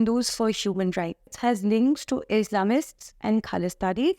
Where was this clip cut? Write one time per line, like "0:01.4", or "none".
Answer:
0:01.3